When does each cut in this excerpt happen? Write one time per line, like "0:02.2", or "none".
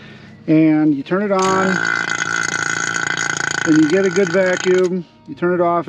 none